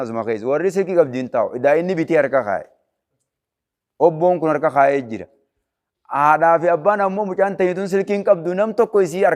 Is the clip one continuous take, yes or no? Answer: yes